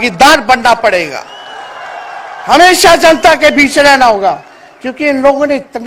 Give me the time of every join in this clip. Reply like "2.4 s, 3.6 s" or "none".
none

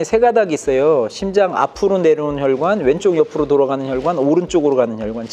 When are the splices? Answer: none

